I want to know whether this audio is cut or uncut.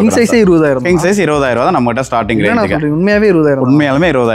uncut